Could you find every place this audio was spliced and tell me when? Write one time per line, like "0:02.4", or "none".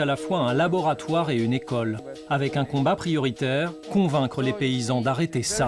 0:02.1
0:03.8